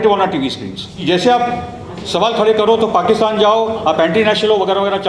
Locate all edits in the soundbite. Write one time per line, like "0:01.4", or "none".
0:01.0